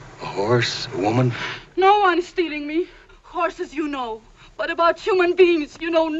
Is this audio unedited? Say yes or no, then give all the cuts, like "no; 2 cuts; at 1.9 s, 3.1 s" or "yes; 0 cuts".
yes; 0 cuts